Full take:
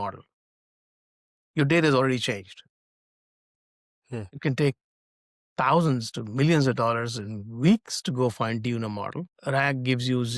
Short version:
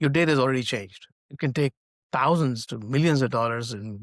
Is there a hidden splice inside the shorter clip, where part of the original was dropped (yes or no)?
yes